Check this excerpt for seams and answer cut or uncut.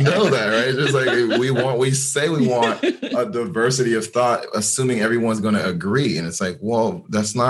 uncut